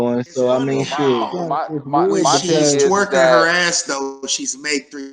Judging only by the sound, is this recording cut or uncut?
cut